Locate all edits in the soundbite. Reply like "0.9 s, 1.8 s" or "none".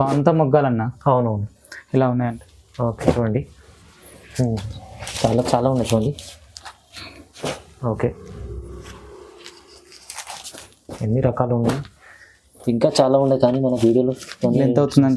2.3 s